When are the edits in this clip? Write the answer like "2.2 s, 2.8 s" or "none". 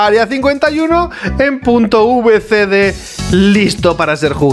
none